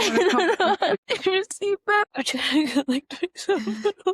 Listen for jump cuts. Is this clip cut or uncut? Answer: cut